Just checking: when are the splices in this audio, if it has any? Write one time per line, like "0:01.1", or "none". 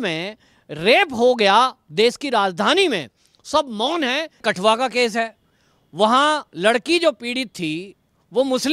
0:04.4